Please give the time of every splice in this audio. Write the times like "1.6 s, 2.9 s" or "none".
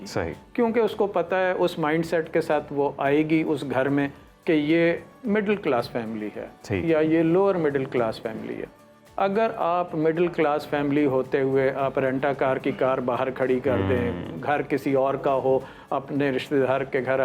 none